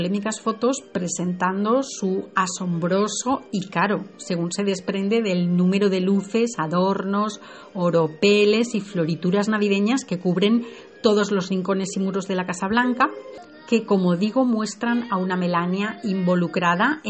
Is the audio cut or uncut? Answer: uncut